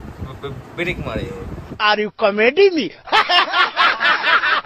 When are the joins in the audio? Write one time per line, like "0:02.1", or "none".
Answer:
none